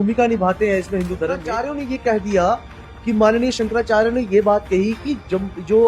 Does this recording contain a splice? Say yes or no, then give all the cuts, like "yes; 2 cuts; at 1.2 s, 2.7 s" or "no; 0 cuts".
yes; 1 cut; at 1.6 s